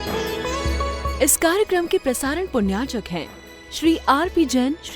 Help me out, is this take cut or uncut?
cut